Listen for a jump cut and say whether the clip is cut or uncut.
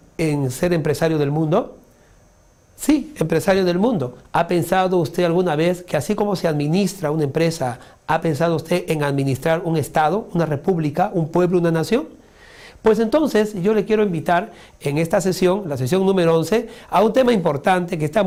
uncut